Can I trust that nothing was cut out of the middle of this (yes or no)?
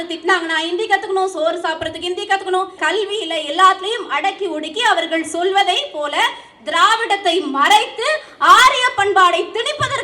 no